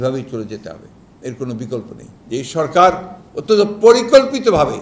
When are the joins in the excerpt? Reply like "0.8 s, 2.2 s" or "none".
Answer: 2.0 s